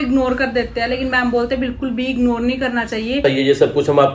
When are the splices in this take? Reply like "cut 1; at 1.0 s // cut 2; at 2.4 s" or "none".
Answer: cut 1; at 3.2 s